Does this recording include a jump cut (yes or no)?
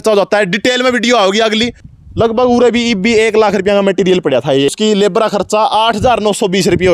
yes